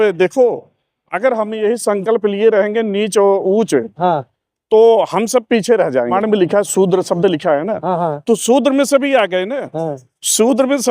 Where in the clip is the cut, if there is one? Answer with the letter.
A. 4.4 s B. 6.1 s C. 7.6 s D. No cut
B